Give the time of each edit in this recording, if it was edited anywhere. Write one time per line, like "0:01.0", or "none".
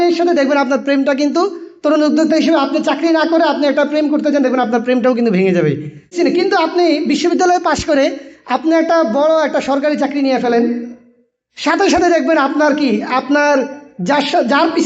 0:06.1